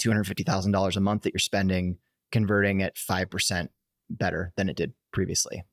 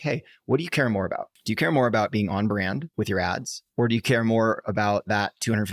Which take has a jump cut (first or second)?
second